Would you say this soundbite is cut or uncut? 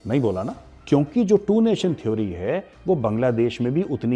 cut